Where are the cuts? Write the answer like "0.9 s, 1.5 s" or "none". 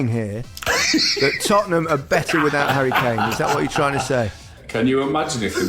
4.8 s